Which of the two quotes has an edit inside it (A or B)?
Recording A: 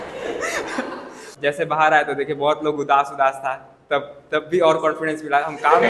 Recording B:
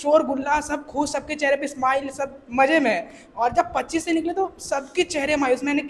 A